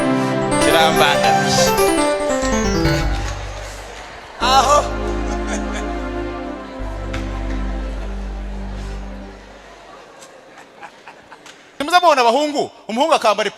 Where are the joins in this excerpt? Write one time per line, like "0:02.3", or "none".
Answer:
0:11.8